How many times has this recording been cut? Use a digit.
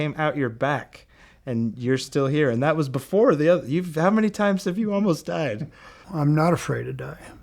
1